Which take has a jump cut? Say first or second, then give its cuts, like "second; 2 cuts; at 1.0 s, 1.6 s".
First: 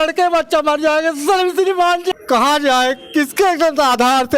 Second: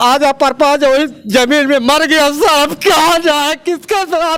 first; 1 cut; at 2.1 s